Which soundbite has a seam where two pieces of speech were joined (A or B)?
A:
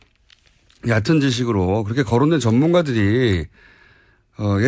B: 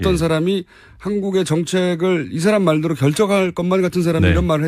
A